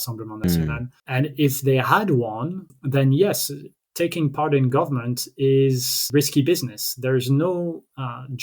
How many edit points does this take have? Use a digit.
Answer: 3